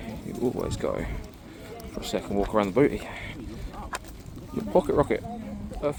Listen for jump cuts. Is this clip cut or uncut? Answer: uncut